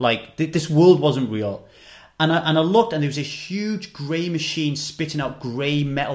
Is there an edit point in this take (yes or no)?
no